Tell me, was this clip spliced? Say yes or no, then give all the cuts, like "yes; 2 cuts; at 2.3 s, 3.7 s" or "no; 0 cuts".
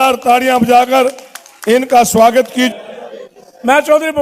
yes; 1 cut; at 2.7 s